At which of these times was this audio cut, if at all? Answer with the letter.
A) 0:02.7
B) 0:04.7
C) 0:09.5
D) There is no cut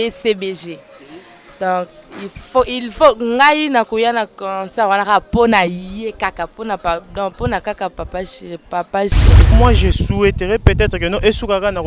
C